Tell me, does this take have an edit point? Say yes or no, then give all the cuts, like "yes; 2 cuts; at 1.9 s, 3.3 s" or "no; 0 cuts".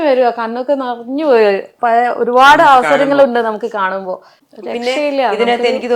no; 0 cuts